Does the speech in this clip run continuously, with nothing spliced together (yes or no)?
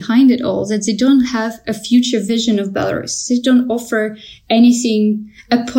yes